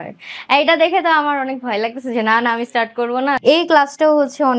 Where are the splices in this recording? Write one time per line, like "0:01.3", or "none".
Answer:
0:03.4

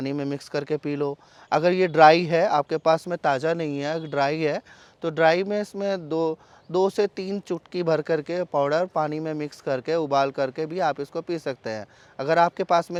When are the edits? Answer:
none

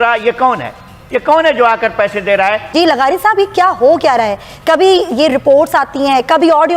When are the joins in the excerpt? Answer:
0:02.6

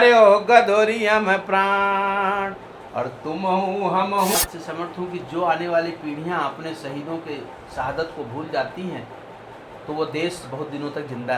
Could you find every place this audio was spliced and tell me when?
0:04.4

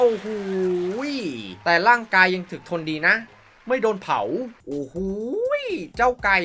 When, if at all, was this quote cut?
none

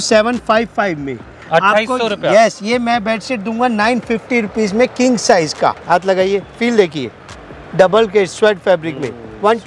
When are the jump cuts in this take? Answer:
0:05.8

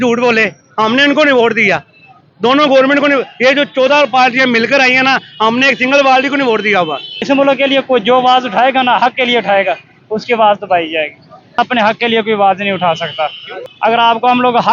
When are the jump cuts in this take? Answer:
0:07.2
0:11.6
0:13.7

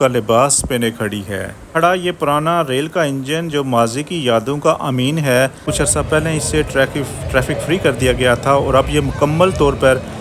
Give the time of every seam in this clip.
0:01.7
0:05.7

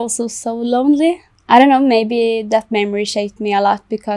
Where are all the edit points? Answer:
0:01.3

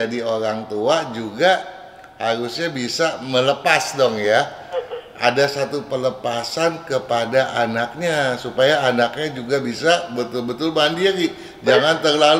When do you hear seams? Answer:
none

